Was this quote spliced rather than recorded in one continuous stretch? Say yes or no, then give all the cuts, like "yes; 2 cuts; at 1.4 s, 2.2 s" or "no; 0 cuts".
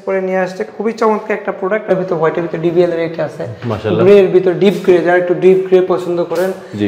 yes; 1 cut; at 1.9 s